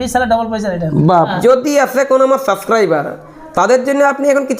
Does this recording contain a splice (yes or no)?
yes